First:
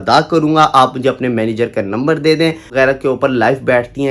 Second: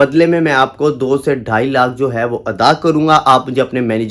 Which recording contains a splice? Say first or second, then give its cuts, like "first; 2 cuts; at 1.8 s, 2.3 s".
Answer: first; 1 cut; at 2.6 s